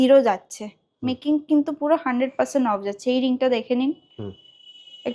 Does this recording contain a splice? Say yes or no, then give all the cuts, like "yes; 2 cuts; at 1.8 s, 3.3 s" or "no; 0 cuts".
no; 0 cuts